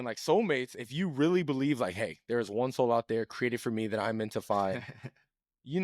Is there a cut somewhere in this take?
no; 0 cuts

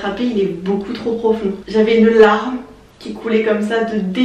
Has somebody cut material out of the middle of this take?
yes; 1 cut; at 1.6 s

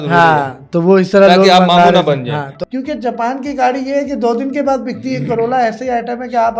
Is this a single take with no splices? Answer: no; 1 cut; at 2.5 s

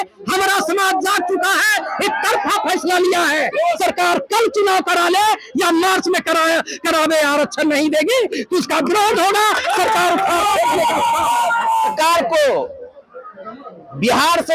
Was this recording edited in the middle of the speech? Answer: yes; 2 cuts; at 3.8 s, 11.9 s

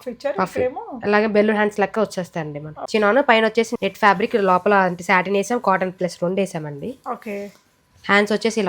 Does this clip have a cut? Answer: yes; 2 cuts; at 2.7 s, 3.7 s

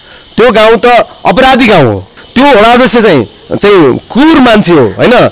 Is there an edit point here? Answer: yes; 1 cut; at 2.2 s

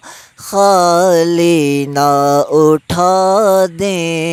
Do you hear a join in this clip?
no; 0 cuts

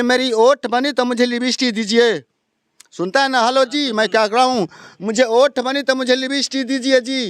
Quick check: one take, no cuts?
yes; 0 cuts

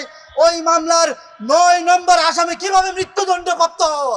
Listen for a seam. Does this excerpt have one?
no; 0 cuts

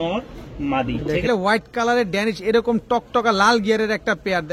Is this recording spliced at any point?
yes; 1 cut; at 1.3 s

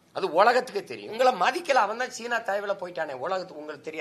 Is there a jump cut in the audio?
yes; 1 cut; at 1.1 s

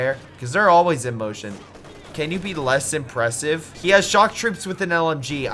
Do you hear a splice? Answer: yes; 1 cut; at 3.7 s

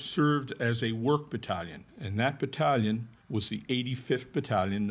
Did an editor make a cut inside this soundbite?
yes; 1 cut; at 1.8 s

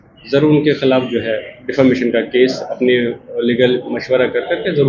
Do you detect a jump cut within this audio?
no; 0 cuts

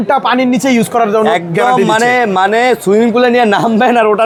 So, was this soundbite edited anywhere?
no; 0 cuts

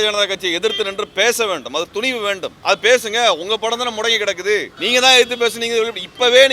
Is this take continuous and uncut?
no; 2 cuts; at 2.5 s, 4.7 s

